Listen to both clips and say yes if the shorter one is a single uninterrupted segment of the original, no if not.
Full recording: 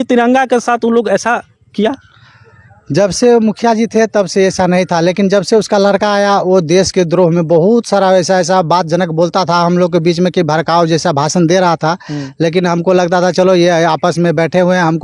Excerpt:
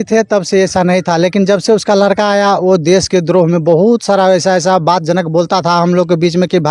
yes